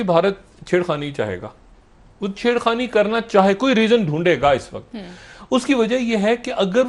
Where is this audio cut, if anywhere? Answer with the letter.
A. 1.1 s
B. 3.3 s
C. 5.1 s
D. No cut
D